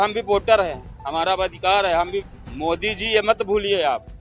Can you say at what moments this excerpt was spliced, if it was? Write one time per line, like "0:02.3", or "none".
0:02.3